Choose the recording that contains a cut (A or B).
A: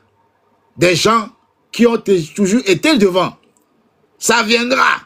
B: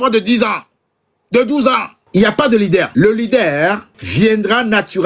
B